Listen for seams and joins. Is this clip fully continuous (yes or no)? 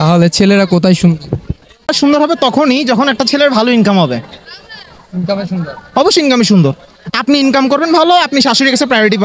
no